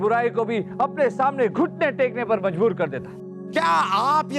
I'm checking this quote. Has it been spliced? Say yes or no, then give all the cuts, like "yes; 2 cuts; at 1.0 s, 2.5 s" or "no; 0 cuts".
yes; 1 cut; at 3.4 s